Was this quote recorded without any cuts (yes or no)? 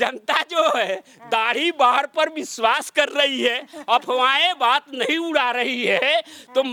yes